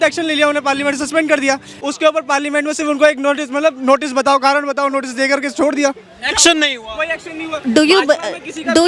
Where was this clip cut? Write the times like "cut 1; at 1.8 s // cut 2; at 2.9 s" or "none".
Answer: none